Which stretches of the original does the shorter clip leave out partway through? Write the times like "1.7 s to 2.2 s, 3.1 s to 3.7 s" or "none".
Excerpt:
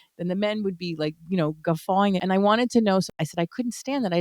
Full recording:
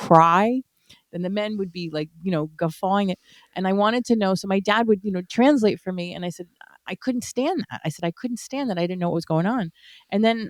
3.2 s to 3.6 s, 4.4 s to 7.7 s